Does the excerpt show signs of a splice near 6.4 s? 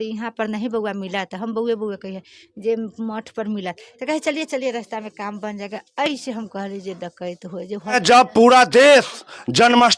no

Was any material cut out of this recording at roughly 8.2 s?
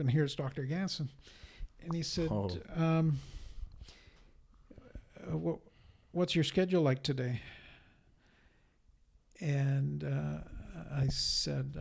no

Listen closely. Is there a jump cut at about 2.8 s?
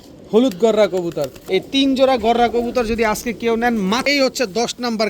no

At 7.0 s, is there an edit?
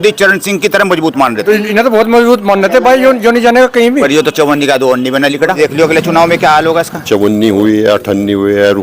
yes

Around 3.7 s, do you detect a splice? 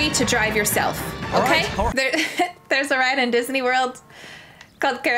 no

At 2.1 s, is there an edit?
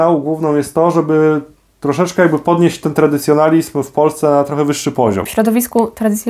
no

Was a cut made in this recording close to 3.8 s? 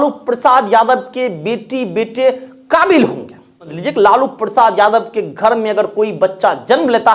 yes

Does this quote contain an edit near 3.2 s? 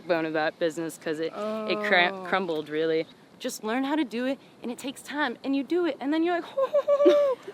yes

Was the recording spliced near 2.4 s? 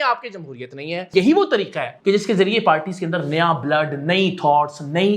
no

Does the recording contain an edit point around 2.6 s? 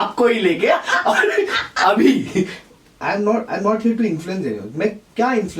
yes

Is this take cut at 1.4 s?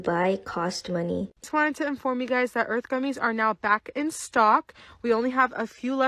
yes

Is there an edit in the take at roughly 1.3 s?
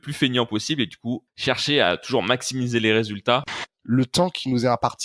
yes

